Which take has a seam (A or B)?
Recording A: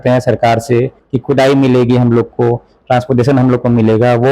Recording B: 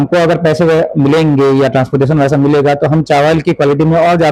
A